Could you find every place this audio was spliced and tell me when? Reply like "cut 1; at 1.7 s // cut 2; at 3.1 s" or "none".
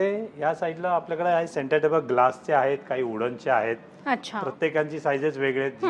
none